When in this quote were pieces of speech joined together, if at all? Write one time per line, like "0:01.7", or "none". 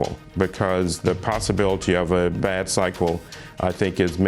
none